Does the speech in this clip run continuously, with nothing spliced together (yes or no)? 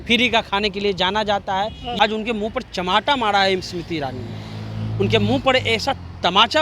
no